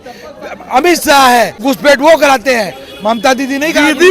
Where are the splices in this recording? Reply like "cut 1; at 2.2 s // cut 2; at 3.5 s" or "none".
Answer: cut 1; at 1.6 s